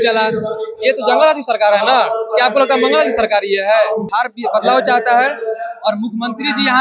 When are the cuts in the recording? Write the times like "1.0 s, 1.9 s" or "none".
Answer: 4.1 s